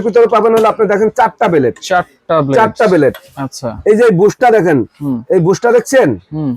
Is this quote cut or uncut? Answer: uncut